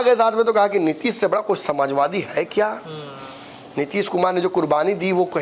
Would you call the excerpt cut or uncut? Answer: uncut